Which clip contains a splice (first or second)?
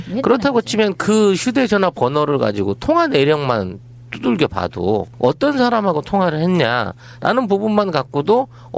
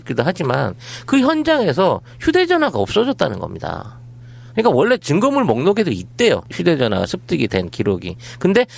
second